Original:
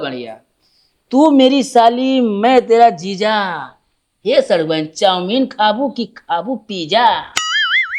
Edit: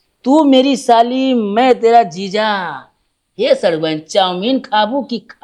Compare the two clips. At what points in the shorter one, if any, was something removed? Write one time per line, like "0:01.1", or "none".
none